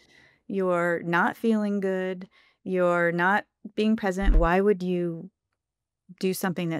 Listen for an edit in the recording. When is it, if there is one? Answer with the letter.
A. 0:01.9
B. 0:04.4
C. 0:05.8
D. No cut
B